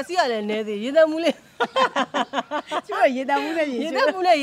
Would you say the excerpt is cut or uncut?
uncut